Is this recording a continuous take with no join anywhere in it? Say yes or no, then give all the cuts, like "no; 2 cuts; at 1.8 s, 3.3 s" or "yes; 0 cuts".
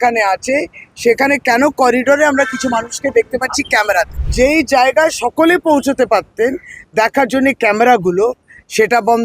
no; 1 cut; at 4.2 s